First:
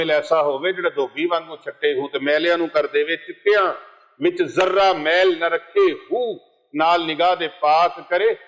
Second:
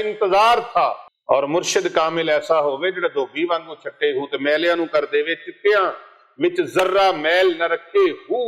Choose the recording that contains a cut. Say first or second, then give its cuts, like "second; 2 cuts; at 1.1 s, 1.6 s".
second; 1 cut; at 1.1 s